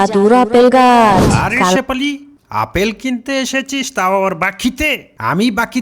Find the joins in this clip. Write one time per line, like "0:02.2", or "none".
0:01.8